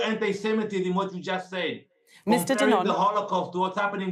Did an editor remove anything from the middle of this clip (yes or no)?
no